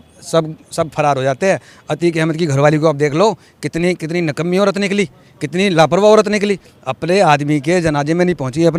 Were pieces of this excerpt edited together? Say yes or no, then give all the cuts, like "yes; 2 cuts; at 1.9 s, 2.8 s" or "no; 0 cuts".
no; 0 cuts